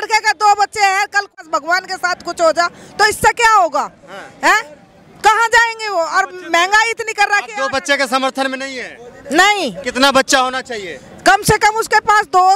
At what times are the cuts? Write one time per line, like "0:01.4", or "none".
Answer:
0:01.4